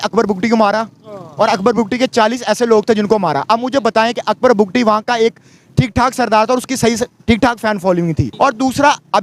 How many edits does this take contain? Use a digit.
1